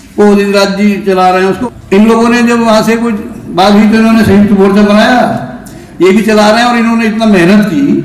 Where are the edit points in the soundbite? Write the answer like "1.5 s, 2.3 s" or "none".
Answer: 1.6 s